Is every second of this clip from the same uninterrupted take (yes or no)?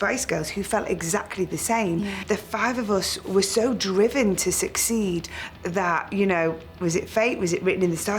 no